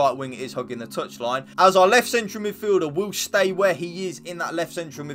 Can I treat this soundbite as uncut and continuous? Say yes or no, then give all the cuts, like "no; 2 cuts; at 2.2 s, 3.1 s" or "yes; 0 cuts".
no; 1 cut; at 1.5 s